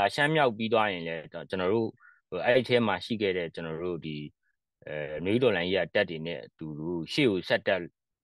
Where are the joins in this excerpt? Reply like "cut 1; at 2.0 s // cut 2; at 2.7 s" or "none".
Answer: none